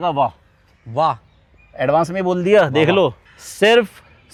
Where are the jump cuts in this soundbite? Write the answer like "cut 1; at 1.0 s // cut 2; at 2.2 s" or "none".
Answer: none